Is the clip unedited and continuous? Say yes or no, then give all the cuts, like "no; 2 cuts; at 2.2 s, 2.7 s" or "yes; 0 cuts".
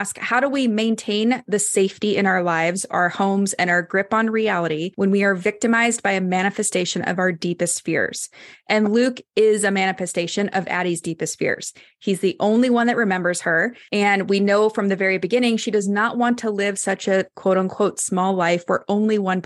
no; 2 cuts; at 4.9 s, 13.8 s